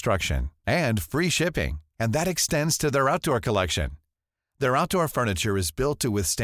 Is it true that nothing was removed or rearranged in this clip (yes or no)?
yes